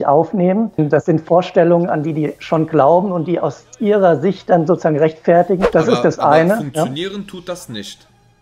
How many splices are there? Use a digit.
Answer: 2